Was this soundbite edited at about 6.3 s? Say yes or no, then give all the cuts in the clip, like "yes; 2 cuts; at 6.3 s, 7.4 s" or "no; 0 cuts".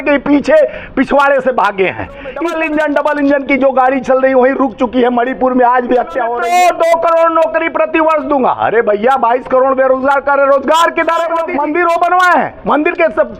yes; 3 cuts; at 2.4 s, 6.3 s, 11.4 s